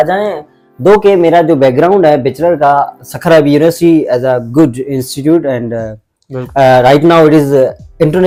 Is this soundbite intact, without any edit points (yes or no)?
yes